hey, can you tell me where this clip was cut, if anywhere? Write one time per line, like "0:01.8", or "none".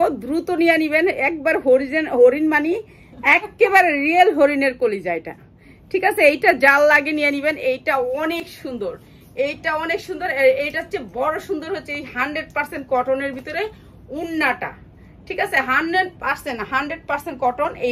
none